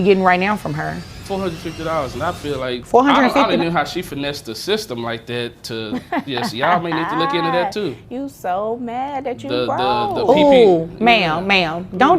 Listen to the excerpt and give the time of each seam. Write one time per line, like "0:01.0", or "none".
0:01.1
0:02.8